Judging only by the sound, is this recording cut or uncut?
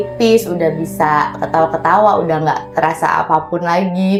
uncut